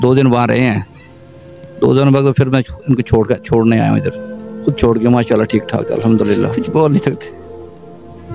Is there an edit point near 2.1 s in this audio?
no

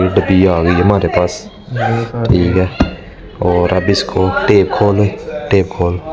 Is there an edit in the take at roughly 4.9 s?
no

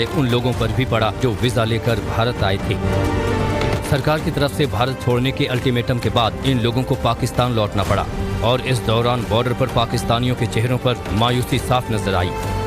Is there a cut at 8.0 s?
yes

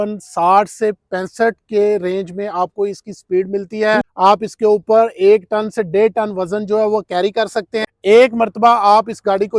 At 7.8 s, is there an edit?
yes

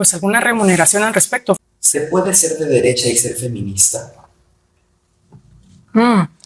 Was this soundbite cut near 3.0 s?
no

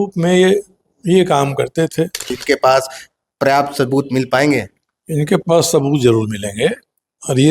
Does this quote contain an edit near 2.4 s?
yes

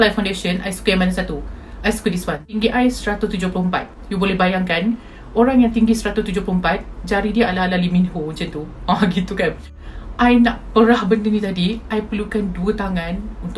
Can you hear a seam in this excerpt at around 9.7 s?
yes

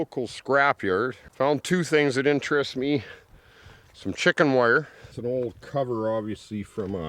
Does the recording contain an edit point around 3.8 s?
no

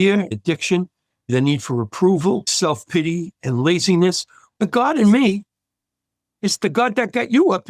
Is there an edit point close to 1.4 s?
no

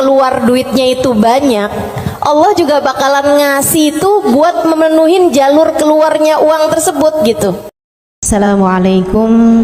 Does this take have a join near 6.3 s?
no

